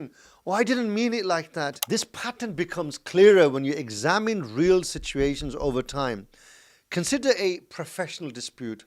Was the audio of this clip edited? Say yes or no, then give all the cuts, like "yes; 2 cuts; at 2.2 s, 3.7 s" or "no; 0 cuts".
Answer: yes; 1 cut; at 1.8 s